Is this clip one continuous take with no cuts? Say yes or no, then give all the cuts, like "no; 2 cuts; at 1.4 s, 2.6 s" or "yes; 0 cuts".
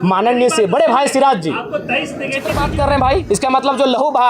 no; 1 cut; at 2.6 s